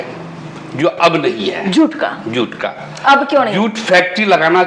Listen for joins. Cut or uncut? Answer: uncut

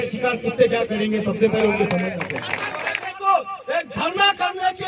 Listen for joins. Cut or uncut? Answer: cut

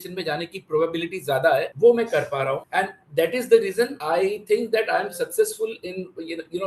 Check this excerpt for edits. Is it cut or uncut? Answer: uncut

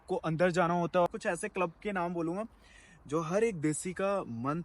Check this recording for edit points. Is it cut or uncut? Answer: cut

